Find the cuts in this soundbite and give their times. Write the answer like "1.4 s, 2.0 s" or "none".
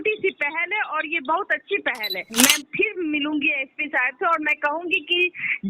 2.2 s